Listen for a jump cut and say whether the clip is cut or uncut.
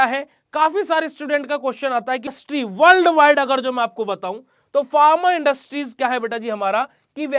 cut